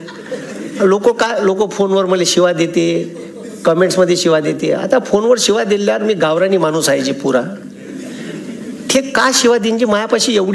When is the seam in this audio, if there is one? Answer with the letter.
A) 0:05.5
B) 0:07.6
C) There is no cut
C